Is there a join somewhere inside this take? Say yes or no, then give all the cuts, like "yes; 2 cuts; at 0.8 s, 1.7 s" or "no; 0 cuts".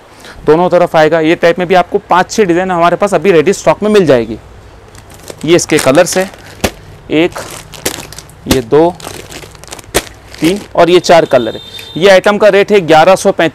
no; 0 cuts